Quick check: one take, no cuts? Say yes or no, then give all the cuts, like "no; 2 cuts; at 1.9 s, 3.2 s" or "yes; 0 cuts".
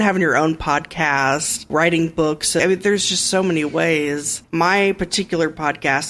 no; 3 cuts; at 1.7 s, 2.6 s, 4.4 s